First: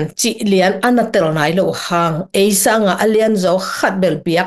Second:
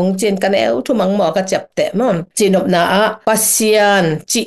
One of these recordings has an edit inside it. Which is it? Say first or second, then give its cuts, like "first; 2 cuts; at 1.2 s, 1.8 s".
second; 1 cut; at 2.3 s